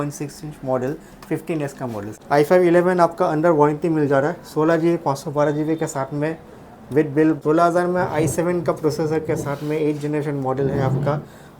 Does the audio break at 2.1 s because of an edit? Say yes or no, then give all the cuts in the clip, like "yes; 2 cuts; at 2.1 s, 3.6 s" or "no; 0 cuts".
yes; 2 cuts; at 2.1 s, 7.4 s